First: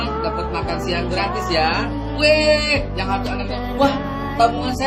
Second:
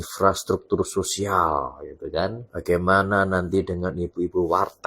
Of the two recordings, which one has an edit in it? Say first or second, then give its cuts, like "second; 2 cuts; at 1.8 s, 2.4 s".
second; 1 cut; at 2.5 s